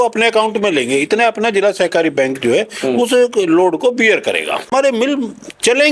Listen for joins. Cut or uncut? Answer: cut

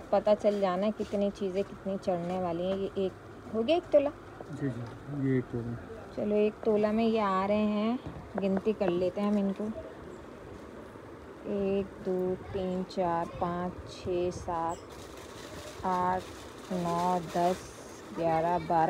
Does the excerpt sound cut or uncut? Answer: uncut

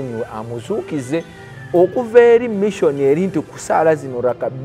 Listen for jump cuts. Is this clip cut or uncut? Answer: uncut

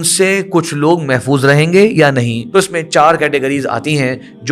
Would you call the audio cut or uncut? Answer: cut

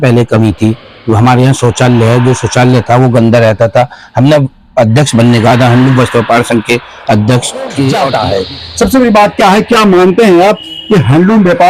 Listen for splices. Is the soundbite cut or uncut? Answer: cut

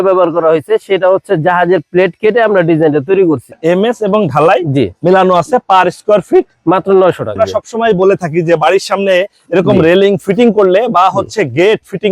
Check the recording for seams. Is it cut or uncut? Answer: cut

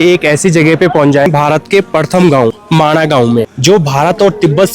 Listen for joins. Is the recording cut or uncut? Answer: cut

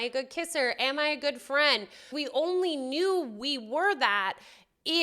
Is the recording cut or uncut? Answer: cut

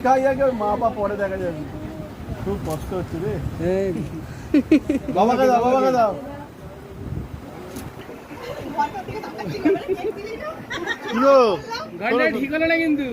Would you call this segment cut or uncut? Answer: cut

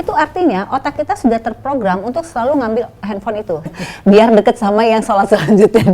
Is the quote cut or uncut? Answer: cut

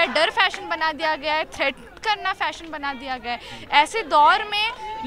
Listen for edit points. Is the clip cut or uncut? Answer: uncut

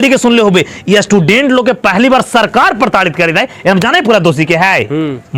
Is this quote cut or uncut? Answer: uncut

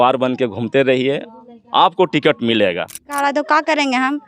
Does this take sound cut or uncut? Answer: cut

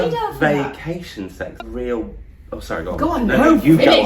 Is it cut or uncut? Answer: cut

